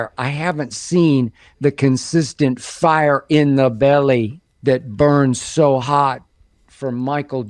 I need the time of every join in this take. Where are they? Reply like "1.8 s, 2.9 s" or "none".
4.4 s